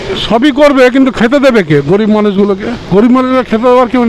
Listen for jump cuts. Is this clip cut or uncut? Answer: cut